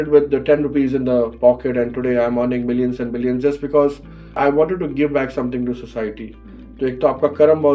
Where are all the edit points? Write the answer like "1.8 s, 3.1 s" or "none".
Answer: 4.3 s